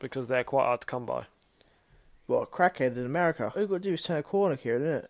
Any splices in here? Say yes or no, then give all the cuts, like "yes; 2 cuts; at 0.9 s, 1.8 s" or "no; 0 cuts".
yes; 1 cut; at 3.5 s